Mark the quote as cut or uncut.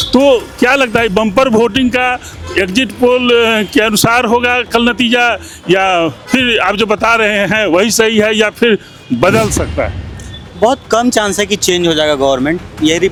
uncut